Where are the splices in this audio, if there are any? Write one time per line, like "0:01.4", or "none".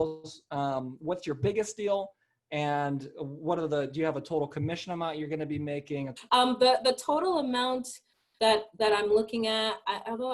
0:06.1